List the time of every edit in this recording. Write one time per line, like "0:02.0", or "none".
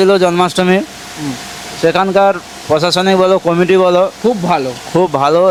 none